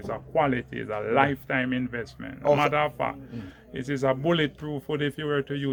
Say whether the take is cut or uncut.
uncut